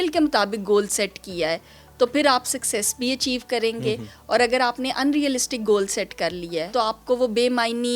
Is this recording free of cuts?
no; 1 cut; at 6.7 s

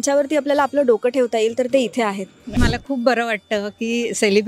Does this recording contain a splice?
yes; 1 cut; at 2.6 s

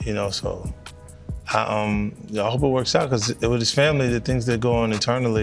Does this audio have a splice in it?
no; 0 cuts

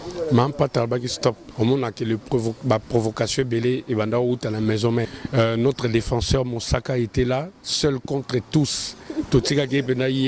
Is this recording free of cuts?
no; 2 cuts; at 1.5 s, 5.2 s

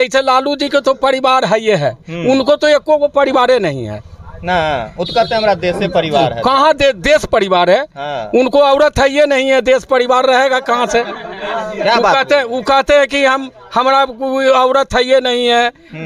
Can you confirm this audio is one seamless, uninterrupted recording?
yes; 0 cuts

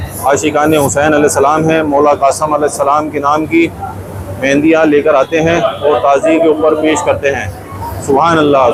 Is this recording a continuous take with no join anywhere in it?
yes; 0 cuts

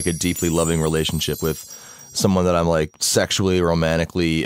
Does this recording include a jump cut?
yes; 2 cuts; at 1.4 s, 2.9 s

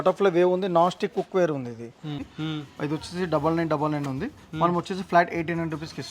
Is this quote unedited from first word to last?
no; 1 cut; at 2.2 s

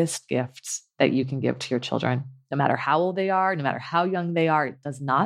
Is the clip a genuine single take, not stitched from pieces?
yes; 0 cuts

